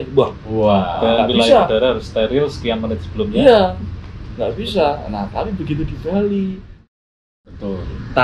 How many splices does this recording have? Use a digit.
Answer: 1